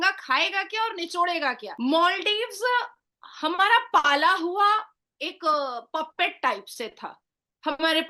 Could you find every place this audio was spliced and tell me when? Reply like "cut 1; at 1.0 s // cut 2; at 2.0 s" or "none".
cut 1; at 1.7 s